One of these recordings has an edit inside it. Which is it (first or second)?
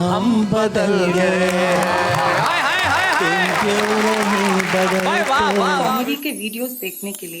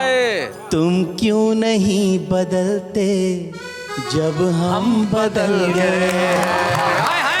first